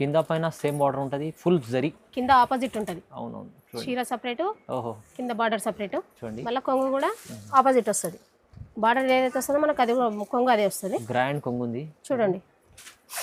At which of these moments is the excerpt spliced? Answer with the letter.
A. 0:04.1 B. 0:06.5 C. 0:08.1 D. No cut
D